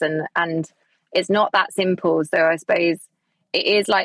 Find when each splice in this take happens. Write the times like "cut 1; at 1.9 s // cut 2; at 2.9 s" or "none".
none